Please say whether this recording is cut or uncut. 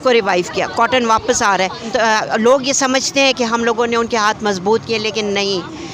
cut